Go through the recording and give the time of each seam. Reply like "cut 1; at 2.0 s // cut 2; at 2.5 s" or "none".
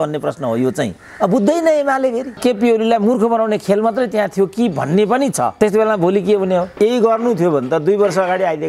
cut 1; at 2.4 s // cut 2; at 6.7 s